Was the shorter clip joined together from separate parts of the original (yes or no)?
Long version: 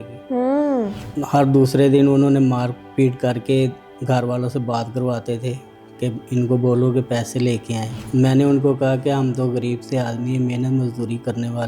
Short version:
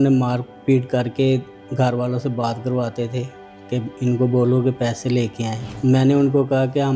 no